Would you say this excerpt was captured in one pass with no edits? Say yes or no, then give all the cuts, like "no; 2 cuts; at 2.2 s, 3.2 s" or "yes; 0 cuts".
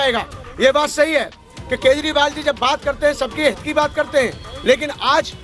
yes; 0 cuts